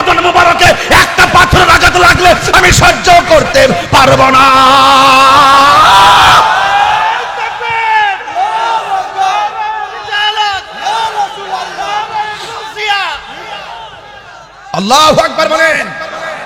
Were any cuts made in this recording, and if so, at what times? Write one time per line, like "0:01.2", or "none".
none